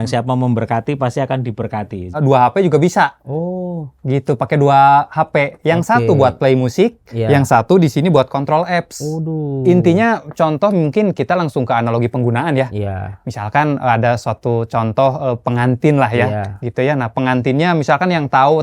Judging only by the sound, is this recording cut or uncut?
cut